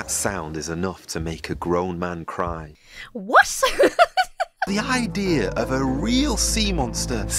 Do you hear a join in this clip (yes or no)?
yes